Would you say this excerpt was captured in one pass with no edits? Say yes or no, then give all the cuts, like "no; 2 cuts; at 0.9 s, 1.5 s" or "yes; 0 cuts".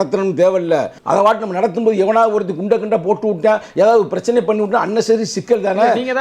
no; 1 cut; at 1.0 s